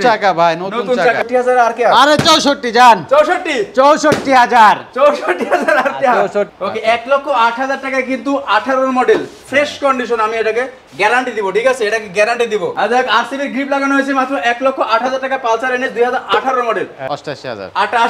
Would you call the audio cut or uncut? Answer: cut